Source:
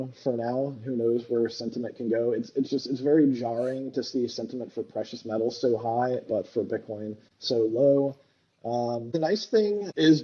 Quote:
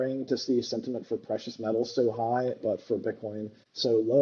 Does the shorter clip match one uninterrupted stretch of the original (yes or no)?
yes